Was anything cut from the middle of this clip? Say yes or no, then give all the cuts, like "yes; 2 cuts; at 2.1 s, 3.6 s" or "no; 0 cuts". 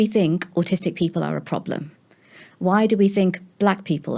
no; 0 cuts